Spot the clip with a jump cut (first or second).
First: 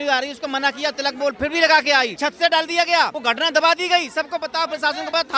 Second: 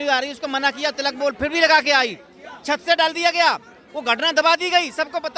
first